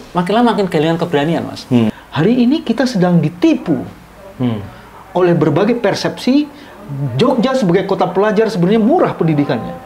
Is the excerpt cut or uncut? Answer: cut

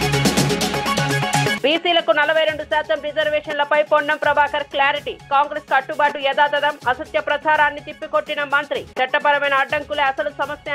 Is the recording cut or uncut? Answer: uncut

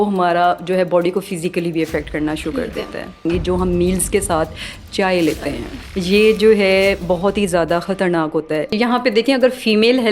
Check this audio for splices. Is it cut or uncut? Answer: cut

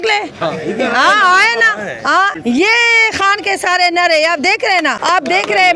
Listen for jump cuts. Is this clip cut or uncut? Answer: cut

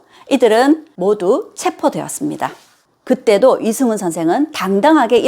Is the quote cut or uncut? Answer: cut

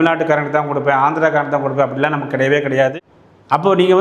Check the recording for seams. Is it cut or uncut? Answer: cut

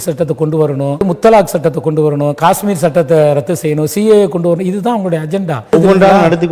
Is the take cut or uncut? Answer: cut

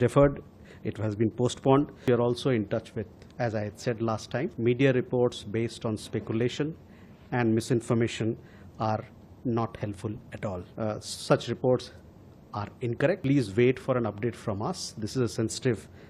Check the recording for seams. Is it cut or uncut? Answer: cut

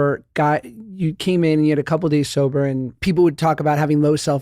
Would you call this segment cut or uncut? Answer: cut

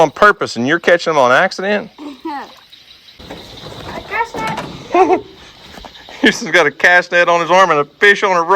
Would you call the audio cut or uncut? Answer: cut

